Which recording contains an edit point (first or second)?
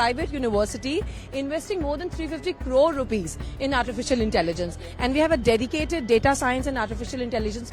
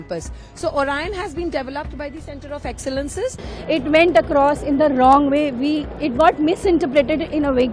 second